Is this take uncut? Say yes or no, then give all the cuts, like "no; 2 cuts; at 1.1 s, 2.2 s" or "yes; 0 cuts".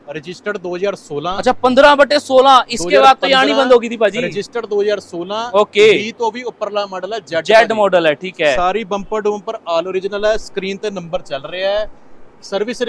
yes; 0 cuts